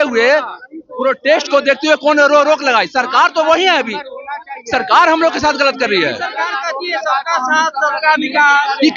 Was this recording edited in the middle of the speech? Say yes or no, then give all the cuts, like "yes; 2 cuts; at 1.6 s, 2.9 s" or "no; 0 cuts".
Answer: no; 0 cuts